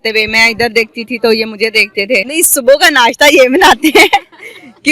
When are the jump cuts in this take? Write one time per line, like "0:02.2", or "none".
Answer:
0:02.3